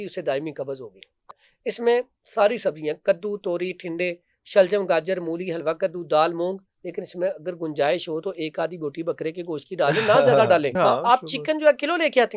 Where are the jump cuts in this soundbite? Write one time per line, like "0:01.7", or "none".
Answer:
0:01.2
0:10.7